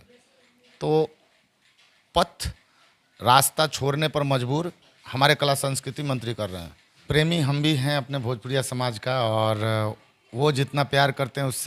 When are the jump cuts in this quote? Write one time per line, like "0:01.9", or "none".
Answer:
0:07.0

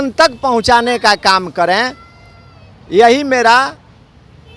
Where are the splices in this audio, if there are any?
none

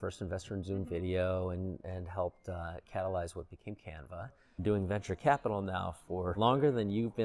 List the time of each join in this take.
0:04.6
0:06.3

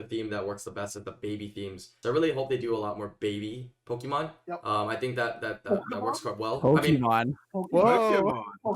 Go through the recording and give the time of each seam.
0:01.9

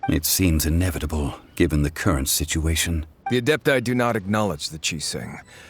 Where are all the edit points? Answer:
0:03.1

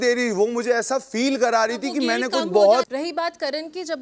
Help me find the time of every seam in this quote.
0:02.9

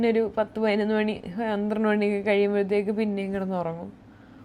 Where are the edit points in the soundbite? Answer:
none

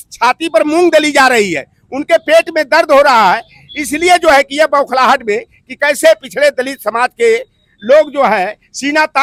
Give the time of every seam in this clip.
none

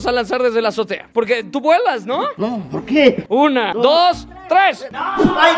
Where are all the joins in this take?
0:01.0
0:03.2

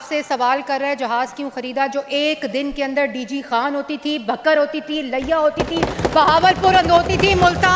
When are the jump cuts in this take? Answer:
none

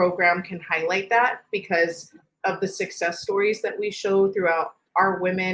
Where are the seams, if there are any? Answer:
none

